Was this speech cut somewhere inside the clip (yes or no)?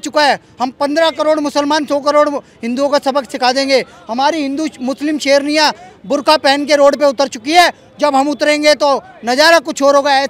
no